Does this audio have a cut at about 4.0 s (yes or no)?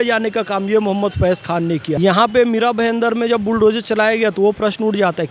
no